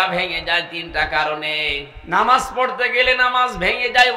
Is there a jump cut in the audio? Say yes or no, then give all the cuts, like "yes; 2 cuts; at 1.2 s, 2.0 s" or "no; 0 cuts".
yes; 1 cut; at 1.9 s